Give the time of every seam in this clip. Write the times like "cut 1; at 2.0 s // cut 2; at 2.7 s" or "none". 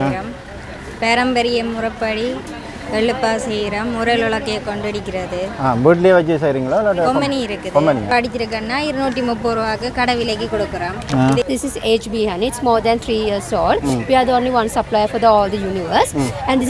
cut 1; at 8.1 s // cut 2; at 11.4 s